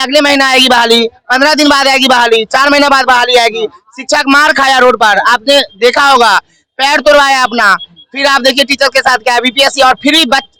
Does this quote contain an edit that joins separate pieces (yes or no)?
no